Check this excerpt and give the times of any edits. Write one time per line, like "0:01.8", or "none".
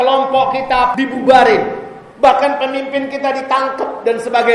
0:00.9